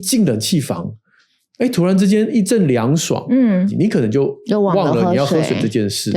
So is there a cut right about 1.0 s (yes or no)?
no